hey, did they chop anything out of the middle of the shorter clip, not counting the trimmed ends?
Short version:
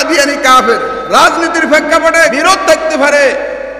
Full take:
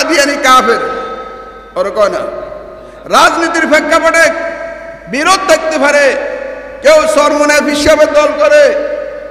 yes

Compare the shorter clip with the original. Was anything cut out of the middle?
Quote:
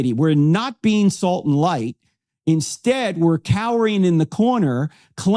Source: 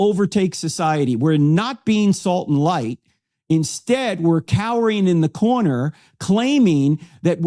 no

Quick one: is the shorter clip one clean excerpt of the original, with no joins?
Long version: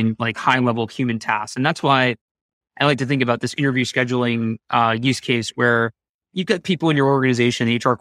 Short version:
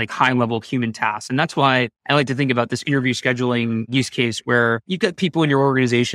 no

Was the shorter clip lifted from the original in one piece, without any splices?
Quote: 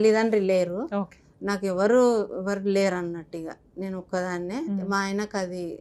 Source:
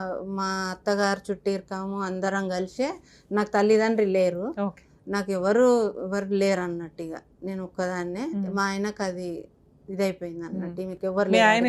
yes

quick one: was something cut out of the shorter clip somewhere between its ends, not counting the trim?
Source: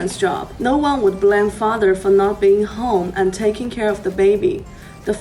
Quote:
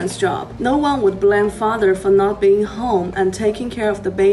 no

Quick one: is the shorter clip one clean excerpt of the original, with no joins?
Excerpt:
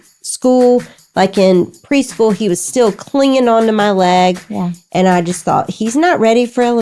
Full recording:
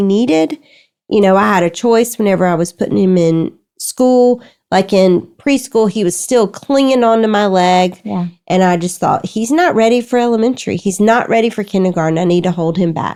yes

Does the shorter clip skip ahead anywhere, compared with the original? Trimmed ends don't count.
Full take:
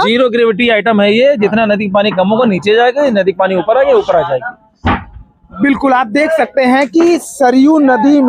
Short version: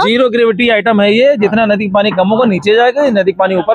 no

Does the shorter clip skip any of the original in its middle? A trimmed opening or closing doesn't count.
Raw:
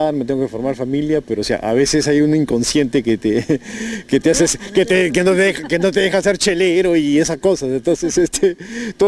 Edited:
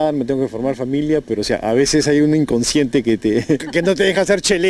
yes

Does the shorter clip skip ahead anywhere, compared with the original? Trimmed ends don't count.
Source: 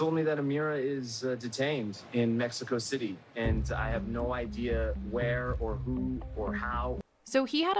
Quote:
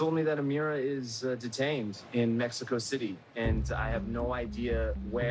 no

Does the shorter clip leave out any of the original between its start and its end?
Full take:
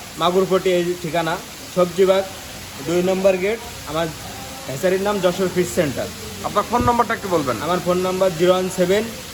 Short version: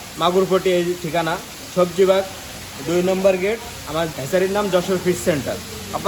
yes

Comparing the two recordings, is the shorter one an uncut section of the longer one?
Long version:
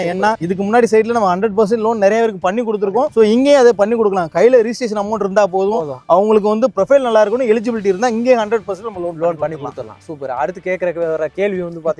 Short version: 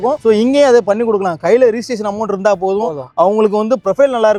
yes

